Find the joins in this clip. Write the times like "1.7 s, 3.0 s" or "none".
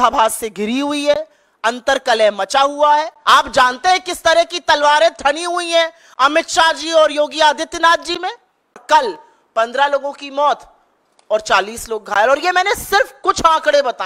3.2 s, 8.8 s